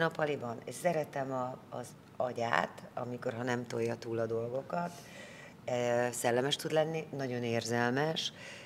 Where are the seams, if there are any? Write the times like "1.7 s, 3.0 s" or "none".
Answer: none